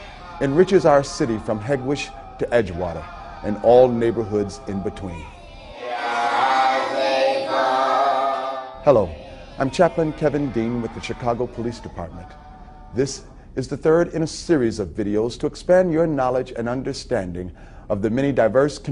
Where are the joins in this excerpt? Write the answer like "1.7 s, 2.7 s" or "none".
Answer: 7.5 s